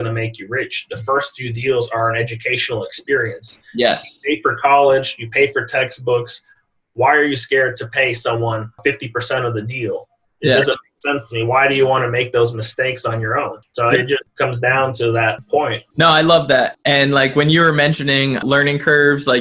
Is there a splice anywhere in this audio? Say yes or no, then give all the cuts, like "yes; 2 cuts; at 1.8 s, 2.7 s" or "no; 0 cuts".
no; 0 cuts